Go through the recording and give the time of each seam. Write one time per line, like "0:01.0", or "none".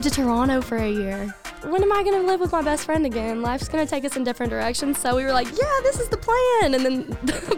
0:01.5